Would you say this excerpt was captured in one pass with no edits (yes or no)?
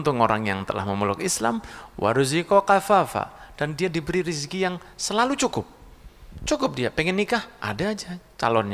yes